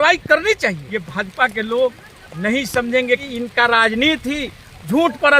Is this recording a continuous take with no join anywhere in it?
no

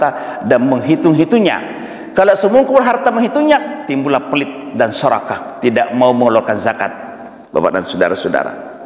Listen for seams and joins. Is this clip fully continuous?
yes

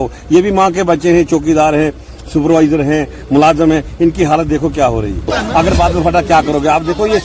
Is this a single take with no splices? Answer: no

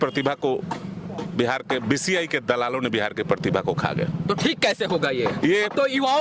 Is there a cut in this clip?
no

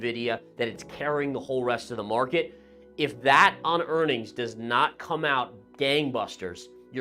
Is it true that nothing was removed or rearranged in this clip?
yes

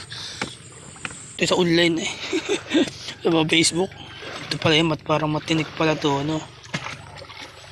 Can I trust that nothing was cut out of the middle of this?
no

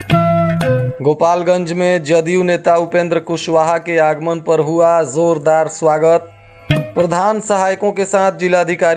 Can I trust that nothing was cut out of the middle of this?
no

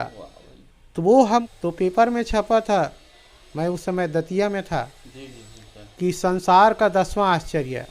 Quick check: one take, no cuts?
no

